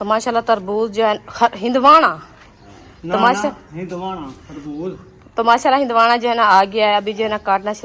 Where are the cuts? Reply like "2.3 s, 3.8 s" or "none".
none